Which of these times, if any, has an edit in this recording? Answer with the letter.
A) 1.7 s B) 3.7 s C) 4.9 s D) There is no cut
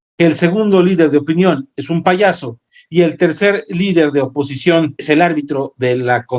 C